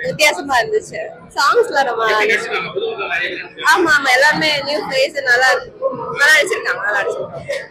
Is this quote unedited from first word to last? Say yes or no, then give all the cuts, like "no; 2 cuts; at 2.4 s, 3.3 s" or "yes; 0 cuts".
yes; 0 cuts